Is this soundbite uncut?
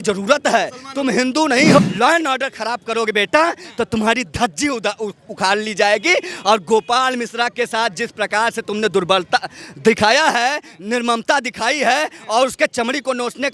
no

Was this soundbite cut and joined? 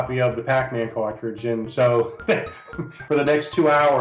yes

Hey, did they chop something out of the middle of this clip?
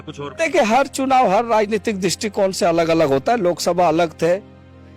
no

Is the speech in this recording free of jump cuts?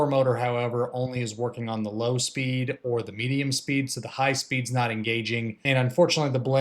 no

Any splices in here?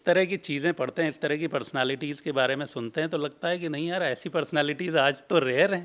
no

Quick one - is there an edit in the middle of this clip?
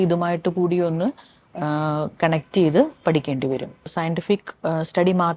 yes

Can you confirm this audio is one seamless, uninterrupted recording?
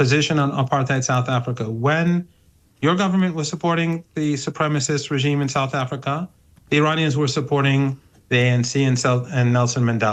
yes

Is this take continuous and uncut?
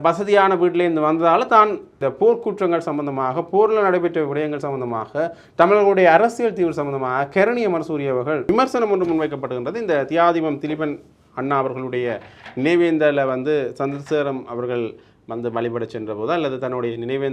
no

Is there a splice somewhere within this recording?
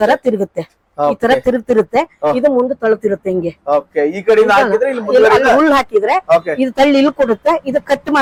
no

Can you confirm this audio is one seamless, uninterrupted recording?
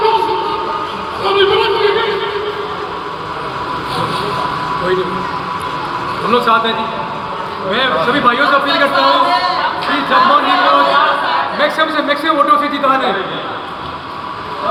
yes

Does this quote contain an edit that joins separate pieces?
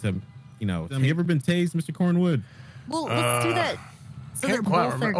yes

